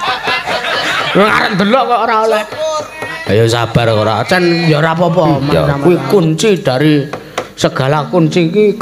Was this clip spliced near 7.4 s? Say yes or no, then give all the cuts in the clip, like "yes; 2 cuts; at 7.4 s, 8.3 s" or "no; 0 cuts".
no; 1 cut; at 5.4 s